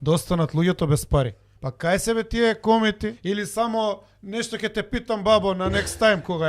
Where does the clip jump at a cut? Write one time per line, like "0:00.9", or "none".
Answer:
0:01.4
0:03.1